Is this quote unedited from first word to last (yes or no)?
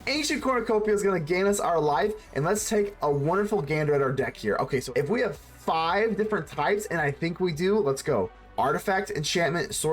no